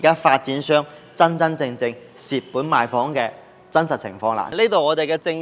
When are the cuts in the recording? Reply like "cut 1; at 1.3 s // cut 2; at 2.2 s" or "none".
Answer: cut 1; at 4.5 s